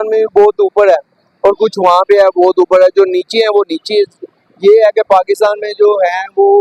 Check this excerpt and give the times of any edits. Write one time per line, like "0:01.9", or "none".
none